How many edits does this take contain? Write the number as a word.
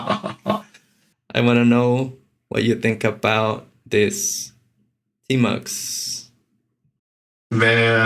one